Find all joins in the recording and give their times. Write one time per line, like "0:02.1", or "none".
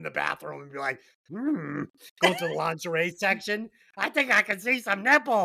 none